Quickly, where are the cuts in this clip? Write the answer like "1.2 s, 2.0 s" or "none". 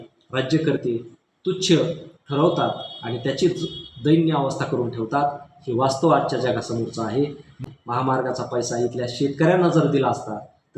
7.6 s